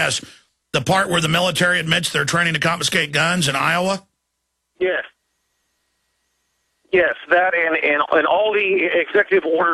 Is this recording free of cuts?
no; 1 cut; at 7.1 s

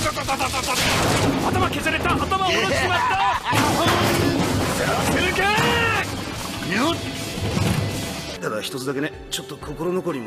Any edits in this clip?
no; 0 cuts

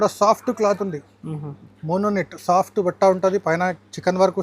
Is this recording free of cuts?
yes; 0 cuts

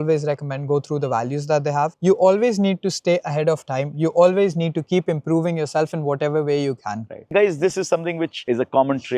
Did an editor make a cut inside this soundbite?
yes; 2 cuts; at 2.0 s, 7.3 s

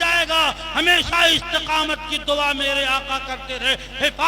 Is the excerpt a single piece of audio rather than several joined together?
yes; 0 cuts

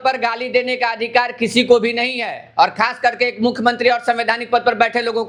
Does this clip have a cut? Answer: no; 0 cuts

